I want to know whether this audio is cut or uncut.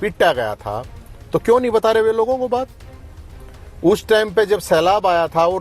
uncut